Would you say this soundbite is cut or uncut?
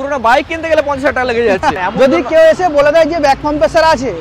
cut